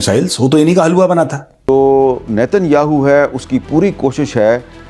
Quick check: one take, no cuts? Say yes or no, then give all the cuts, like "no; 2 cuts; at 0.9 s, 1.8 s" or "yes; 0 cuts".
no; 1 cut; at 1.7 s